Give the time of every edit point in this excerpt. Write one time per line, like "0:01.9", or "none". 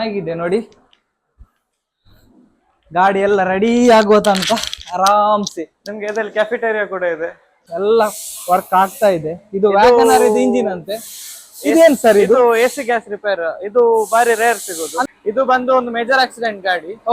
0:07.6
0:15.1